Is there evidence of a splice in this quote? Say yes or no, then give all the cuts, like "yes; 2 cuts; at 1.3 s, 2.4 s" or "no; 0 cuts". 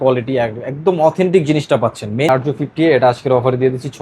yes; 1 cut; at 2.3 s